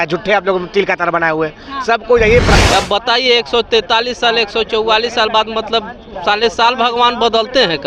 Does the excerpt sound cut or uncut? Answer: cut